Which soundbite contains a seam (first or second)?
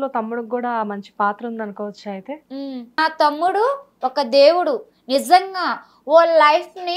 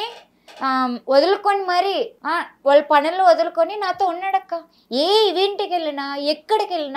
first